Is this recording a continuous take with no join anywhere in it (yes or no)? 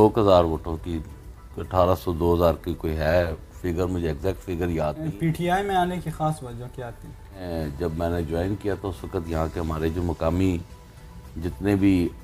no